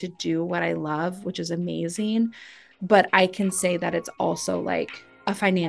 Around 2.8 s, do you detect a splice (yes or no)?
no